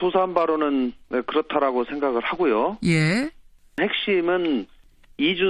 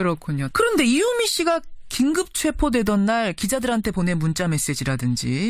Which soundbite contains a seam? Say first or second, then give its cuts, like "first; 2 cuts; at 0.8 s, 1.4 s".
first; 1 cut; at 2.3 s